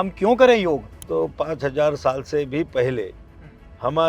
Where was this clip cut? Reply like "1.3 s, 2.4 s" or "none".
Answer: 1.0 s